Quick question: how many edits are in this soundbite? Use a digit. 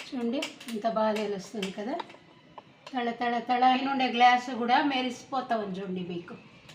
1